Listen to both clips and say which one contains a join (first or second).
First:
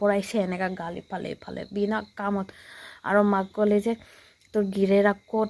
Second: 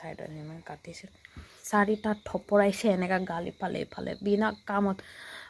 second